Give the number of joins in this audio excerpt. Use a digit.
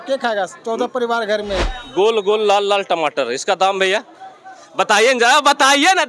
1